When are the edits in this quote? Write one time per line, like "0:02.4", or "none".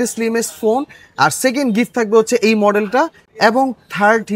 none